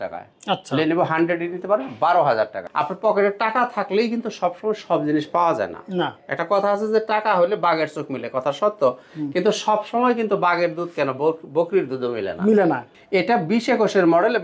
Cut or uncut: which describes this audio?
cut